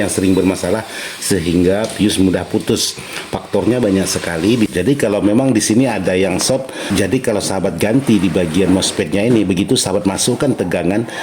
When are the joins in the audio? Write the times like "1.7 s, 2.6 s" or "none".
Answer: 4.7 s, 6.8 s

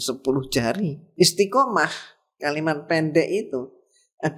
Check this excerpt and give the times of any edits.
1.0 s

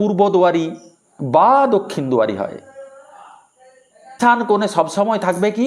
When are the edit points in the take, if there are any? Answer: 4.2 s

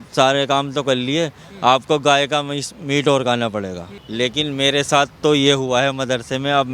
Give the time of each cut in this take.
4.0 s

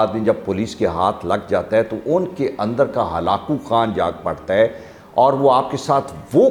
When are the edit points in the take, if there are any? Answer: none

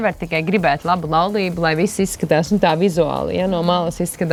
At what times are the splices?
none

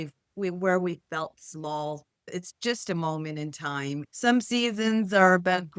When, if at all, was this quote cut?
2.2 s, 4.0 s

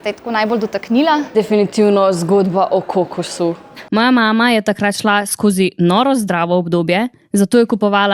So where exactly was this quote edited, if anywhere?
1.3 s

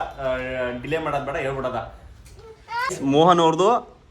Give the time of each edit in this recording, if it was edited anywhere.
2.9 s

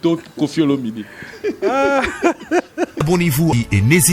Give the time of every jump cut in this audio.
3.0 s

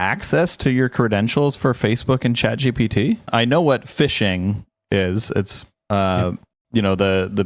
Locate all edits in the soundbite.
3.3 s

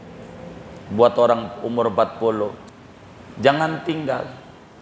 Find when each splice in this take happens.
2.6 s

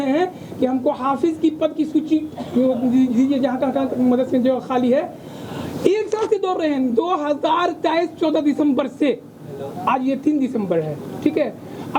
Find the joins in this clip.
none

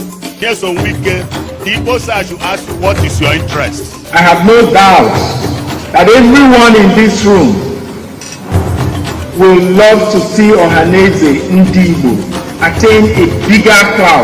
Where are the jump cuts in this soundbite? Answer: 0.9 s

